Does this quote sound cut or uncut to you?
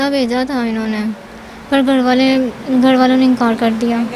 uncut